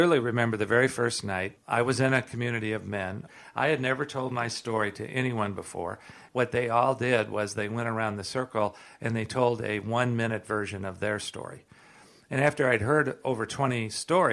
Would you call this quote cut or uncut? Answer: cut